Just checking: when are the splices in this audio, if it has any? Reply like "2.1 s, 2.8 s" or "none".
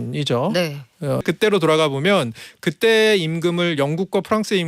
1.2 s